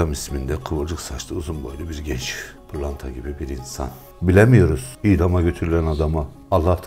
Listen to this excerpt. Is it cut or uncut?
cut